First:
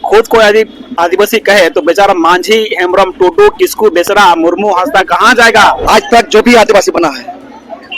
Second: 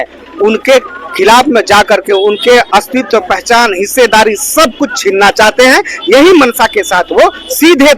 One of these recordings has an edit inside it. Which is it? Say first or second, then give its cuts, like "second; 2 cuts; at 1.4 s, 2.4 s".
first; 1 cut; at 5.8 s